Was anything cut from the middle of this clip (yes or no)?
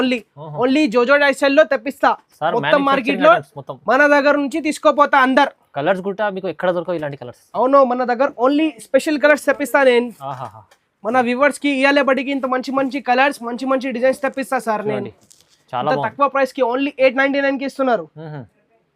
no